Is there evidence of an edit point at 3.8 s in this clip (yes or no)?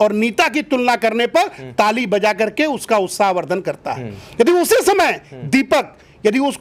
no